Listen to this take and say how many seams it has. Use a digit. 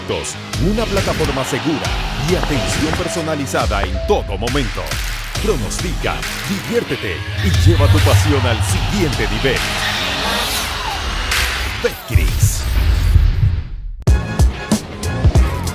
1